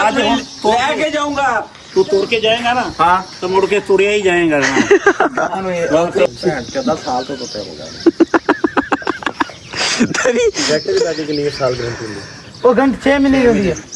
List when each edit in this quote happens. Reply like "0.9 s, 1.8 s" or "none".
6.3 s

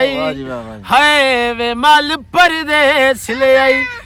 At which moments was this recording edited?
none

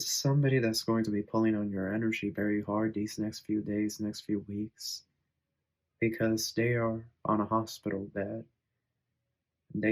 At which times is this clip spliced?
none

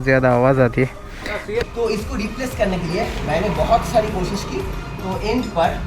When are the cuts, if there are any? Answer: 1.7 s

